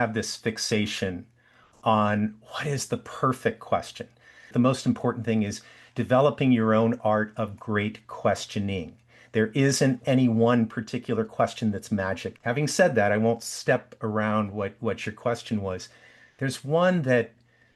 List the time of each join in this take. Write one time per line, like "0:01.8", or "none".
0:04.4
0:10.0